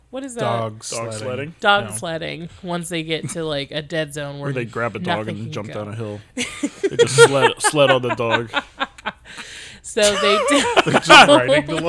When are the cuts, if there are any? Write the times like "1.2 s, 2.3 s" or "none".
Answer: none